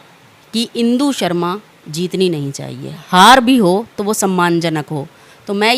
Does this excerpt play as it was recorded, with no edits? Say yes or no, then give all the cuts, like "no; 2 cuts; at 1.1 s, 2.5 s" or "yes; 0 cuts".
no; 1 cut; at 3.0 s